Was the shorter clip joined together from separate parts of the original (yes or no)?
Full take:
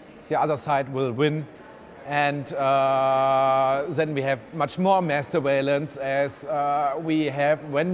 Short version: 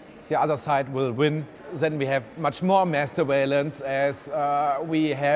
yes